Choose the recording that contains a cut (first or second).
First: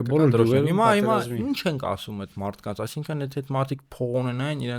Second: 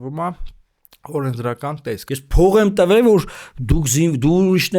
second